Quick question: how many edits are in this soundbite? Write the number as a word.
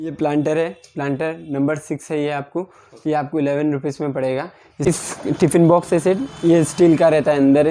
one